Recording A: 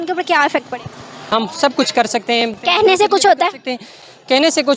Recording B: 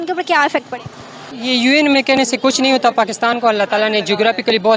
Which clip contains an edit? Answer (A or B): A